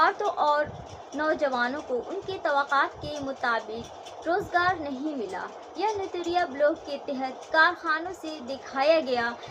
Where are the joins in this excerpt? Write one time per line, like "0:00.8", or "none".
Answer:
none